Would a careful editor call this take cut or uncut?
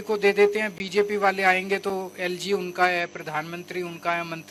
uncut